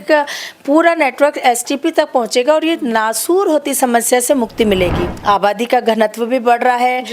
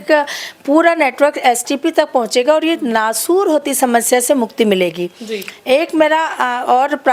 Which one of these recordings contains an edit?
first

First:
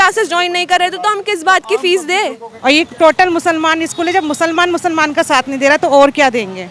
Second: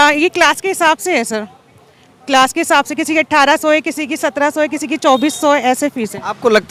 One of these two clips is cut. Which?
first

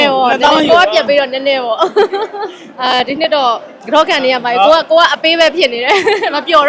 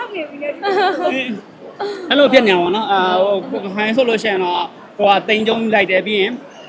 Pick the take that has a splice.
first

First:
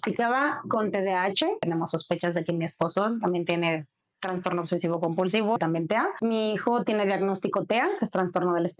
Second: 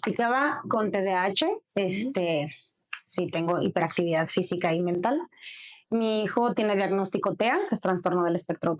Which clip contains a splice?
first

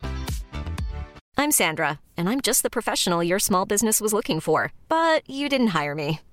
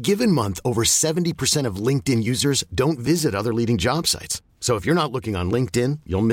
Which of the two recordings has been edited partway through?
first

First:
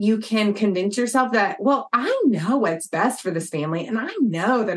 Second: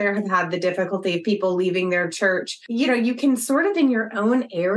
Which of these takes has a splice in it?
second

